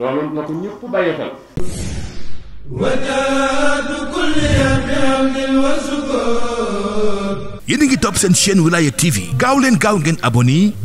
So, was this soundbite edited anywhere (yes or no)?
yes